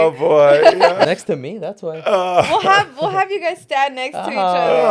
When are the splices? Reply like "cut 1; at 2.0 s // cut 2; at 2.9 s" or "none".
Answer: cut 1; at 1.1 s